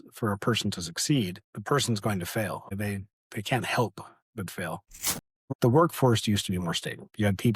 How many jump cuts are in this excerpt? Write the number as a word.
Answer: one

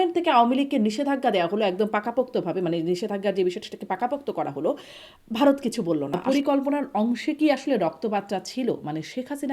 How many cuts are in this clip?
one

